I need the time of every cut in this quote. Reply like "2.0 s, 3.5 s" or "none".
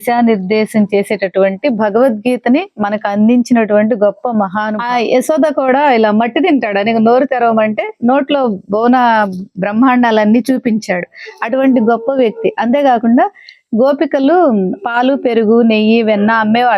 4.7 s